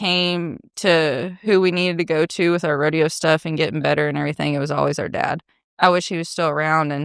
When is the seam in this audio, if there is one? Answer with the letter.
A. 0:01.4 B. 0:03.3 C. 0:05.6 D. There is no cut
C